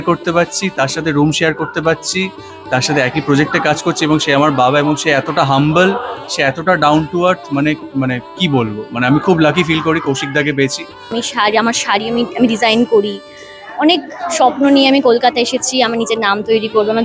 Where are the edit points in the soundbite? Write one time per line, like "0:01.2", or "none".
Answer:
0:11.2